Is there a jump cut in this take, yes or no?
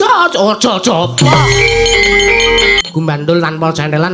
yes